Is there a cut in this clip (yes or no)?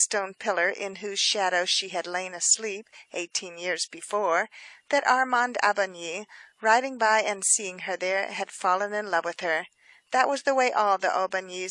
no